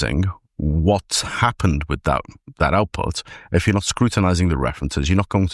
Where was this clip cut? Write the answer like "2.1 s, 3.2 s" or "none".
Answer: none